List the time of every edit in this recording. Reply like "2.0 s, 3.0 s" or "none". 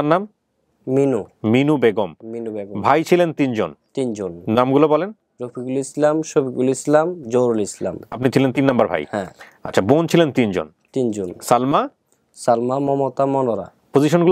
none